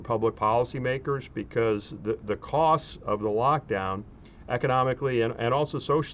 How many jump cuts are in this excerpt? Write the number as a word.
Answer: zero